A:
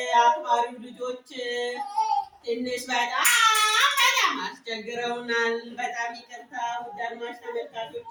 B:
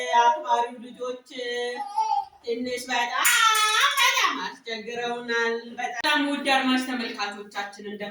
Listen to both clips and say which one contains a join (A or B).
B